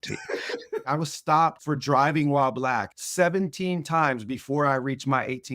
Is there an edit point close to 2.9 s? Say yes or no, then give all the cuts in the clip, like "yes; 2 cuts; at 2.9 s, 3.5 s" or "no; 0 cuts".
yes; 3 cuts; at 0.9 s, 1.6 s, 2.9 s